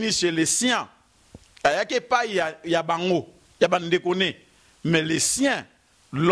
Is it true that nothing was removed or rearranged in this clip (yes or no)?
yes